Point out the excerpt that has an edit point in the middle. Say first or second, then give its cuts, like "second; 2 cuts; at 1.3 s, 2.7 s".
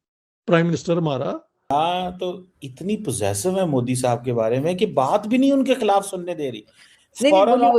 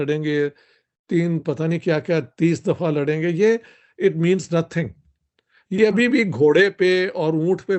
first; 1 cut; at 1.7 s